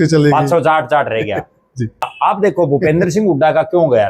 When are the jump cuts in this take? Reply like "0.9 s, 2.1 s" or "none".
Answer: 2.1 s